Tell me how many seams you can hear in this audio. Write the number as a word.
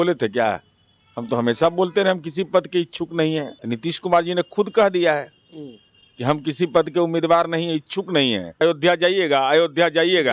two